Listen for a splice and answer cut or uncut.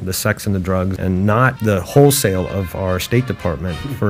cut